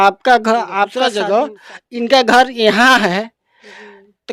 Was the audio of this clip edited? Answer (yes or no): yes